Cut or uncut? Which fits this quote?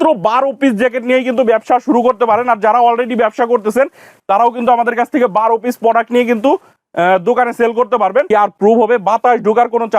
cut